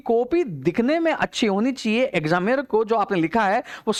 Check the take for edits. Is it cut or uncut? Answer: uncut